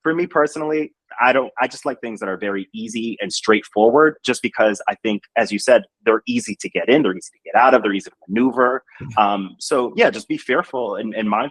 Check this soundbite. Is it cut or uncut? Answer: uncut